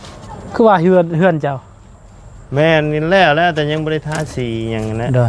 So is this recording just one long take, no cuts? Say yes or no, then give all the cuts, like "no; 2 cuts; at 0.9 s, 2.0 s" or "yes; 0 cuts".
yes; 0 cuts